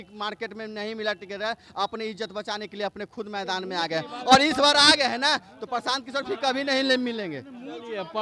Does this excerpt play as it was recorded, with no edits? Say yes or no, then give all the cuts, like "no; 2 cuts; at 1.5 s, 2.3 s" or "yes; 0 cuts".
yes; 0 cuts